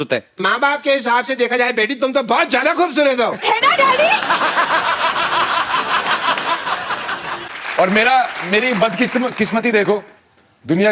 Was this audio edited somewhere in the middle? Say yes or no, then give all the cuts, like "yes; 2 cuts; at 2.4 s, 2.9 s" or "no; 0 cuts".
yes; 1 cut; at 7.5 s